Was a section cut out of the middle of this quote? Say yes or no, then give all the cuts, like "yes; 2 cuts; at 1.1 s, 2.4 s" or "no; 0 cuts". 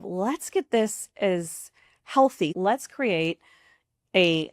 yes; 1 cut; at 2.5 s